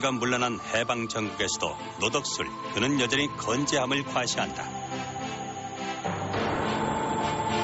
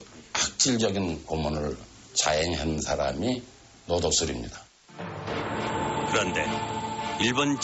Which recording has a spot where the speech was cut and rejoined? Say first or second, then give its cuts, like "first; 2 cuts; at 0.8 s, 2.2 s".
second; 3 cuts; at 2.3 s, 2.3 s, 3.3 s